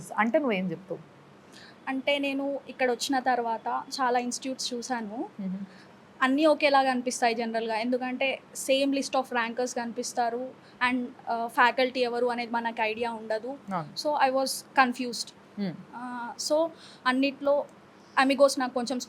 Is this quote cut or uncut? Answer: uncut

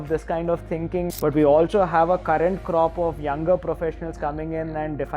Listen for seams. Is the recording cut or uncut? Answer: cut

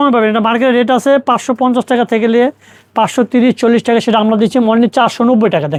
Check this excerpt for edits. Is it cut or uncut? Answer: uncut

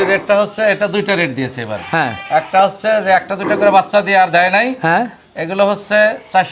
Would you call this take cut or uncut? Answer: uncut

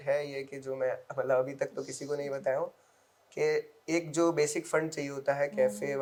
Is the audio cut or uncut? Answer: uncut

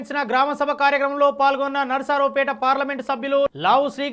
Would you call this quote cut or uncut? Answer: uncut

